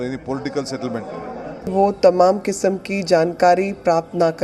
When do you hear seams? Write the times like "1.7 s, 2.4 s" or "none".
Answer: 1.7 s